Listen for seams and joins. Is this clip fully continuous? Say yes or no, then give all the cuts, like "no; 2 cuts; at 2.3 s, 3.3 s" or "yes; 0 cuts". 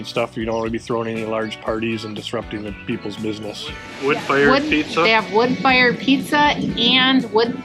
no; 1 cut; at 3.8 s